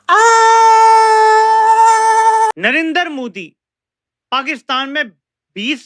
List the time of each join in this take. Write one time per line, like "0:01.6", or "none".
0:02.5